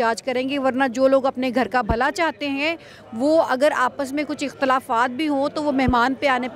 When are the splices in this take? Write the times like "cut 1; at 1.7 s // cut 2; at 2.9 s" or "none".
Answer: none